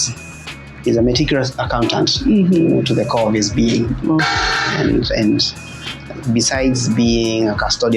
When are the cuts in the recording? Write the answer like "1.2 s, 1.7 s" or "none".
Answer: none